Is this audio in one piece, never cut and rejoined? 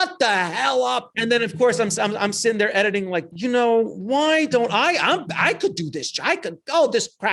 no; 2 cuts; at 1.1 s, 3.3 s

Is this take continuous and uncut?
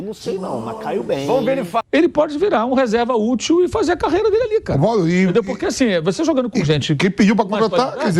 no; 1 cut; at 1.8 s

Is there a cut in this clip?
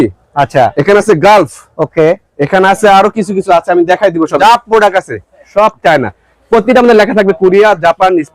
yes; 1 cut; at 4.4 s

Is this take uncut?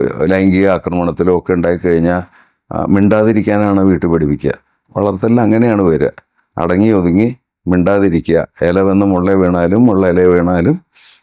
yes; 0 cuts

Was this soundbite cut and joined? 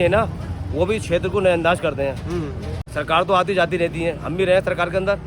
yes; 1 cut; at 2.8 s

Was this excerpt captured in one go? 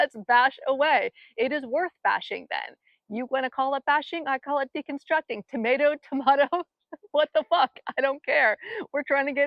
yes; 0 cuts

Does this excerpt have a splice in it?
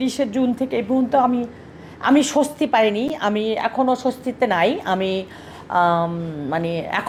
no; 0 cuts

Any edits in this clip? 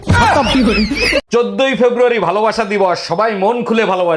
yes; 1 cut; at 1.2 s

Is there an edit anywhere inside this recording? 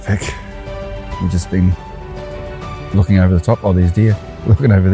yes; 1 cut; at 1.0 s

